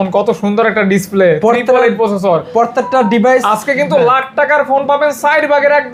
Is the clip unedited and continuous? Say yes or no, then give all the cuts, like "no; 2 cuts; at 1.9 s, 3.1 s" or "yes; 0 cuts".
yes; 0 cuts